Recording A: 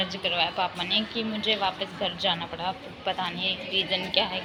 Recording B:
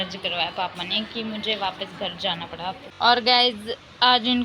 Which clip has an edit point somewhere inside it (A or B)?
B